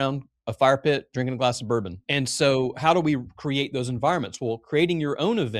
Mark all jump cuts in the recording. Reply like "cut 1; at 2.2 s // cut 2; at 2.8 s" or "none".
cut 1; at 2.0 s